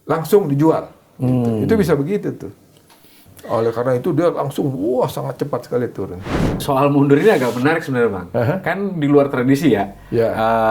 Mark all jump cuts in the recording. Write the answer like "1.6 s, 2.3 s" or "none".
3.2 s, 6.6 s